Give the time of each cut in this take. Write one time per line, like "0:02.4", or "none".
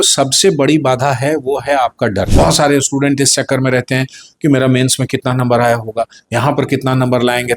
0:02.3